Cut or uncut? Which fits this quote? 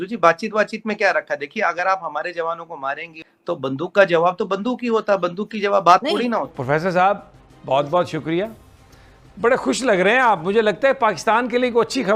cut